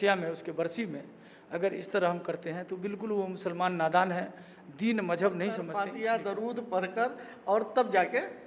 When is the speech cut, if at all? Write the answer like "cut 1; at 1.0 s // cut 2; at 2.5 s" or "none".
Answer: cut 1; at 5.7 s

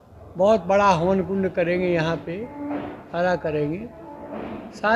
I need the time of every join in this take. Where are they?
none

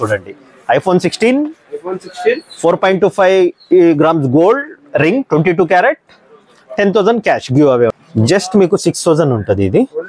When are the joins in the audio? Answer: cut 1; at 8.0 s

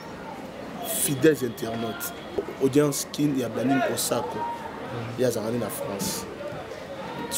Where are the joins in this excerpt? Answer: cut 1; at 2.4 s

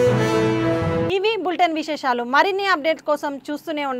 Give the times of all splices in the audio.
none

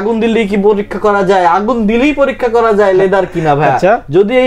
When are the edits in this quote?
none

